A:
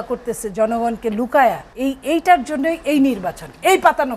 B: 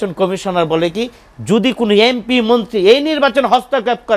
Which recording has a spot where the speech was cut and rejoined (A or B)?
A